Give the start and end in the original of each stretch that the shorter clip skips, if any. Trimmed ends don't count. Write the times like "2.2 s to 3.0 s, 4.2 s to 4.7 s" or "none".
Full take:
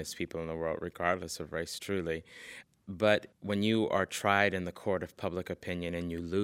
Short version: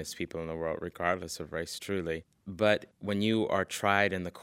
2.4 s to 2.8 s